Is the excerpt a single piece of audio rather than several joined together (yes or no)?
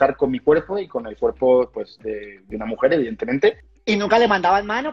no